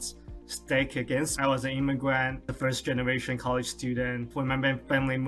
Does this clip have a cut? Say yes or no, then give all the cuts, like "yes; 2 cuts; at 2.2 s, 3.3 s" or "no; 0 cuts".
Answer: yes; 1 cut; at 4.3 s